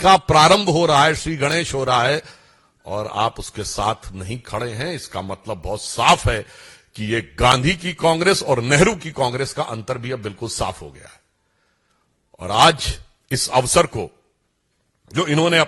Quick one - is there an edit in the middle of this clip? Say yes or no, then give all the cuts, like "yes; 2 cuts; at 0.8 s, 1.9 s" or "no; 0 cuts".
no; 0 cuts